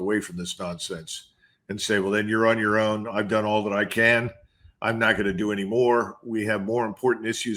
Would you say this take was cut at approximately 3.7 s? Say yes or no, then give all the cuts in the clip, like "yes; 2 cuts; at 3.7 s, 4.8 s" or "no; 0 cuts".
no; 0 cuts